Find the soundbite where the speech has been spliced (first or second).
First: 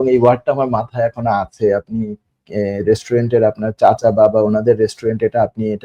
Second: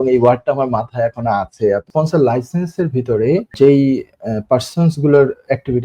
second